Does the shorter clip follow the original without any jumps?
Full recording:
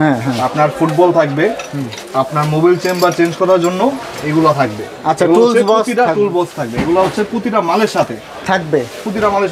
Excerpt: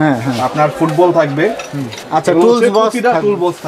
no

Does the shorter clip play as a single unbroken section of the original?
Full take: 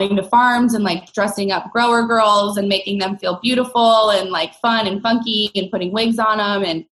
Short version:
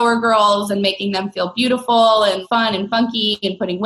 no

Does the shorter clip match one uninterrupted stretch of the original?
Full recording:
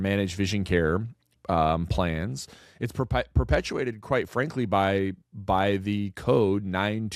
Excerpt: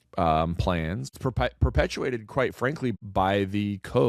no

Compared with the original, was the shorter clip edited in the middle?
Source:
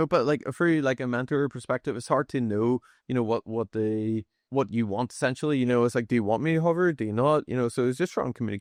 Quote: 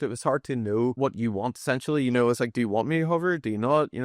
yes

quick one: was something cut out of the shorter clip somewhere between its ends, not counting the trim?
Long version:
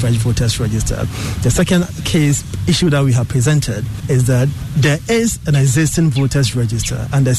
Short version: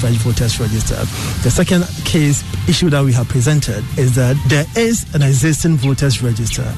yes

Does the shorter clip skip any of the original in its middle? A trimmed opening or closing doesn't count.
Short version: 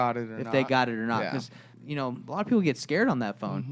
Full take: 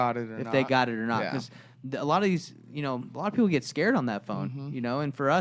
yes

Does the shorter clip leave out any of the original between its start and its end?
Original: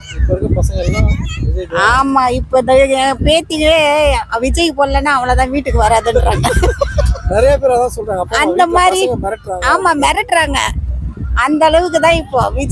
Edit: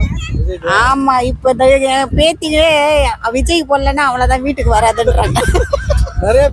no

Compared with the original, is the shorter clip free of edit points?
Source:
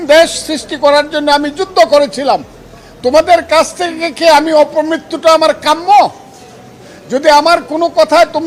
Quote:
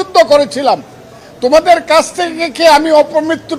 yes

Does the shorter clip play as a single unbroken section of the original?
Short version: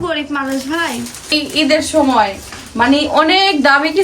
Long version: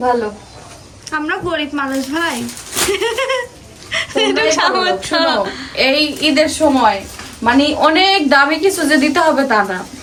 no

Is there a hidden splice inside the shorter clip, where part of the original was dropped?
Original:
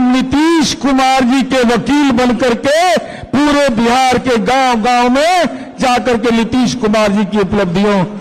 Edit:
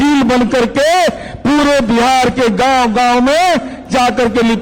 no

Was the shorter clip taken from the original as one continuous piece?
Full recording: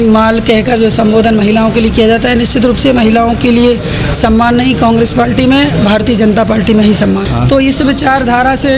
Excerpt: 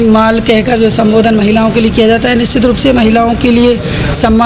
yes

